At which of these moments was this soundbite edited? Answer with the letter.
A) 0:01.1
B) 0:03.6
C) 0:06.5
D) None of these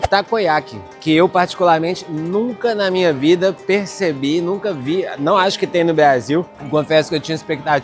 C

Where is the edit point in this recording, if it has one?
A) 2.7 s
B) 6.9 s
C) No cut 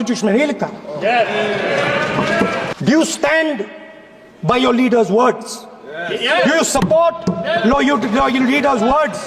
A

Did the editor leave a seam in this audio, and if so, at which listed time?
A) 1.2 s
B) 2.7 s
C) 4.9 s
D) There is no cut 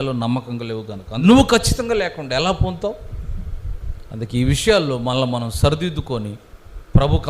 A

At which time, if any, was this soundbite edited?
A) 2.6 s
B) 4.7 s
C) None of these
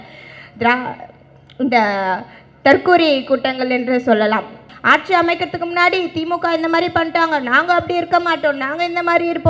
B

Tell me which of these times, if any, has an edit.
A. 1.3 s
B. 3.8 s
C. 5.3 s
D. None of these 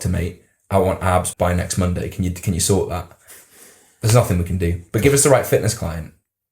A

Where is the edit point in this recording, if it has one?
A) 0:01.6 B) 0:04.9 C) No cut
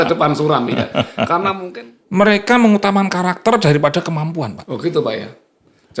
A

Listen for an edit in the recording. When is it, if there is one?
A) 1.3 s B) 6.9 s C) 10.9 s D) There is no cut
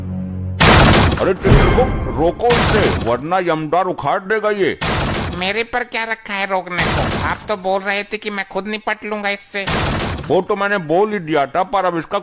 D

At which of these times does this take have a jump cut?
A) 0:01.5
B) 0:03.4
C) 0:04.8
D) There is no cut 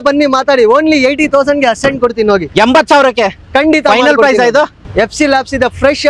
C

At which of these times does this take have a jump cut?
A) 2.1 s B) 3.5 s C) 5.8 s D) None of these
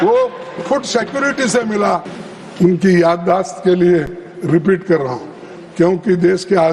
A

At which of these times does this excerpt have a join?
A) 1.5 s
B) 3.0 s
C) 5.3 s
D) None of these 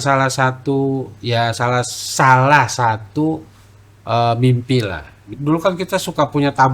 C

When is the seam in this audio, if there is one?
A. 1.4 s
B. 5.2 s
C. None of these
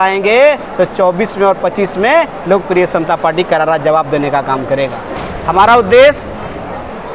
B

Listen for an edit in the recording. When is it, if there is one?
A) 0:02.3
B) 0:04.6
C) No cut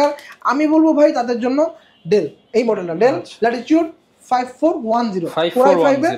C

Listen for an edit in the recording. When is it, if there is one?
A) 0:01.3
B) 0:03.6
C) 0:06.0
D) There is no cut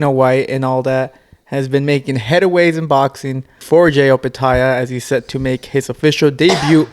B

